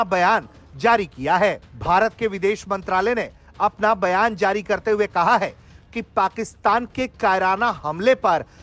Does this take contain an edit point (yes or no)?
no